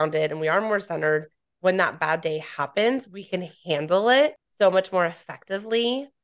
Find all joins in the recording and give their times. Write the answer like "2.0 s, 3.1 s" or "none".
4.4 s